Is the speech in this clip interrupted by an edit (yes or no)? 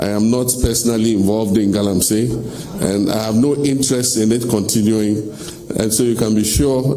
no